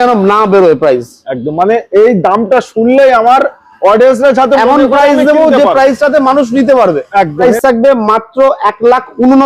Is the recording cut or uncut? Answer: cut